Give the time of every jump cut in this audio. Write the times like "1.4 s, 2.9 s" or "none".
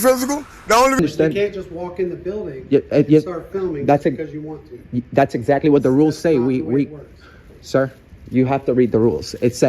1.0 s